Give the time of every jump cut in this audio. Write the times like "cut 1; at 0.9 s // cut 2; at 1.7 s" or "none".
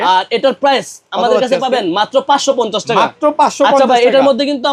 none